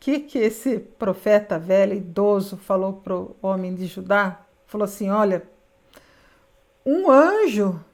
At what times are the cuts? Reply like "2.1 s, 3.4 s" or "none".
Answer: none